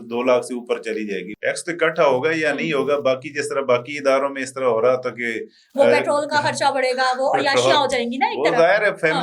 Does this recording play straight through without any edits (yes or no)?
no